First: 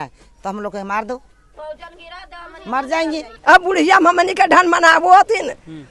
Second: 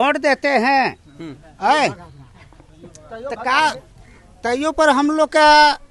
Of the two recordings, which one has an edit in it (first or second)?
first